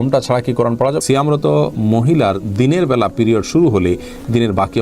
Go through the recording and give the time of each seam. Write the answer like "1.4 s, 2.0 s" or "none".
1.0 s

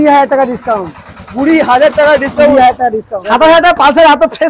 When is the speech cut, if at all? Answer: 3.1 s

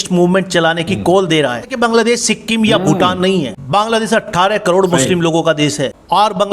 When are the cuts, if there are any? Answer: 1.7 s

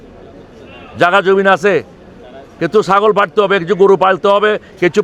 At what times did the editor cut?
none

